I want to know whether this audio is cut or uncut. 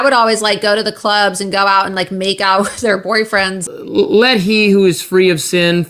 cut